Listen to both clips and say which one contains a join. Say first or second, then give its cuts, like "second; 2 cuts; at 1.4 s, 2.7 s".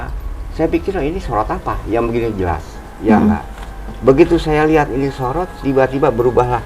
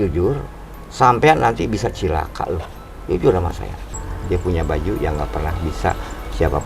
second; 1 cut; at 4.1 s